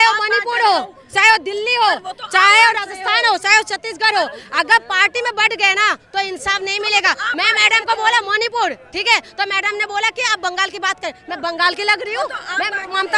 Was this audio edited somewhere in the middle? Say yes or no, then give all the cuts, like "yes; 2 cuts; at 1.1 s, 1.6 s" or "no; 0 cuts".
no; 0 cuts